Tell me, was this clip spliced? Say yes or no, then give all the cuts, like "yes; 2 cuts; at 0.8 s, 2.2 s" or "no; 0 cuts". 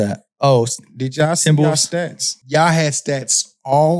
yes; 1 cut; at 2.4 s